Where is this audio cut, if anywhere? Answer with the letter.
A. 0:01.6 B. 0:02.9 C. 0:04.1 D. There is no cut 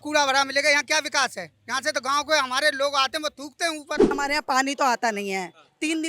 C